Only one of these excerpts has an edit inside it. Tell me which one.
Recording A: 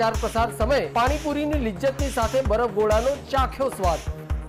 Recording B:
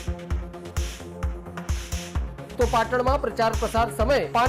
B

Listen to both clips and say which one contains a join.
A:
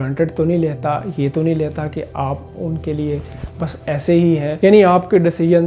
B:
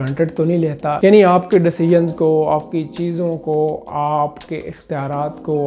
B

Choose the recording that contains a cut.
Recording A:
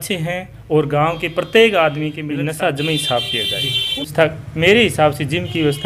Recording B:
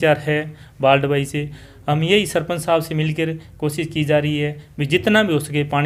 A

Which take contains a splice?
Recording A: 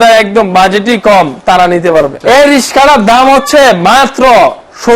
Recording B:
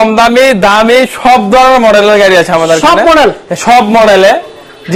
A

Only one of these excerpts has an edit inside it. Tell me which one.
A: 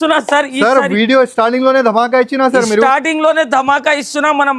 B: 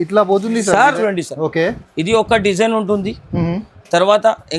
B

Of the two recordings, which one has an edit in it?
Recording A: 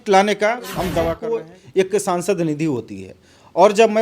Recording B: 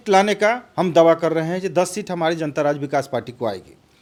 A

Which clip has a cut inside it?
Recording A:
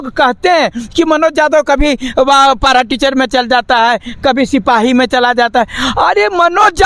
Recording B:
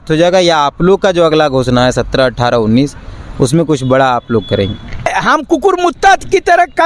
B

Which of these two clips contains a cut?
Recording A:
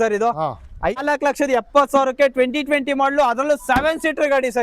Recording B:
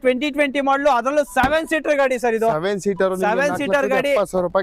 A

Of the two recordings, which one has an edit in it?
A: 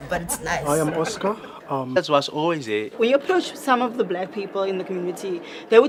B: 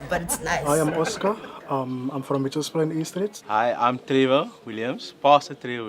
B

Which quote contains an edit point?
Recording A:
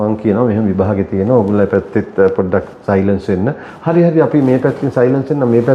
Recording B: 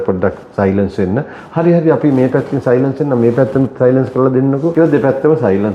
B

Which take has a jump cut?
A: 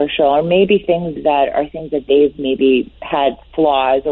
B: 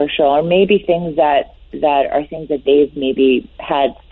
A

